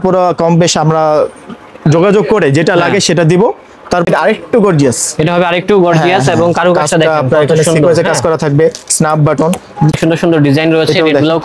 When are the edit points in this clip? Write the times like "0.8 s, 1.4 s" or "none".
4.1 s, 10.0 s